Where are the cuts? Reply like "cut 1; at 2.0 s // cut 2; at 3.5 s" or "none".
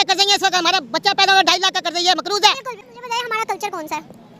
cut 1; at 2.7 s